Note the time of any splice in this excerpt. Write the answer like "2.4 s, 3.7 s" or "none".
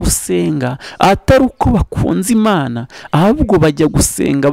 none